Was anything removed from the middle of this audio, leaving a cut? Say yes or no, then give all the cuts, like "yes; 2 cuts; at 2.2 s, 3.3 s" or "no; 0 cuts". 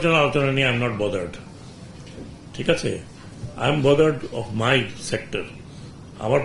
no; 0 cuts